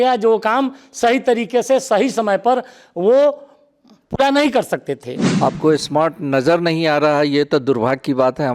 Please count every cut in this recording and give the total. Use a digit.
1